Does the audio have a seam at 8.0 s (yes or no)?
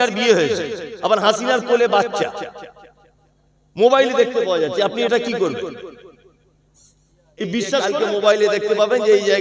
yes